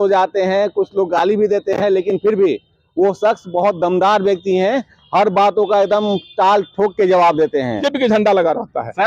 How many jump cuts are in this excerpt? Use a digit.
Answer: 1